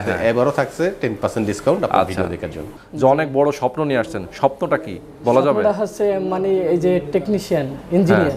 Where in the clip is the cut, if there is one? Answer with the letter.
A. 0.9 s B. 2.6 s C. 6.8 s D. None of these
B